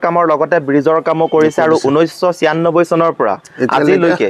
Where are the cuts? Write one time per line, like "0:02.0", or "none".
none